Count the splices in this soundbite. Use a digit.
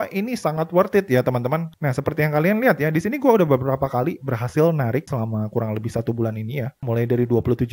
2